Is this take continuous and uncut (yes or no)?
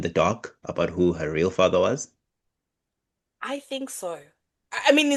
yes